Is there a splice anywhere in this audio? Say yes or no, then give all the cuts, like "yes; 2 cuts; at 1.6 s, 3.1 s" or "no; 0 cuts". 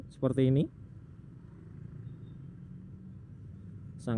no; 0 cuts